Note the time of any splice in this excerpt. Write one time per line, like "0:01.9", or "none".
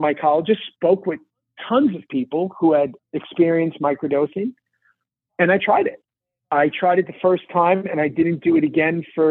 none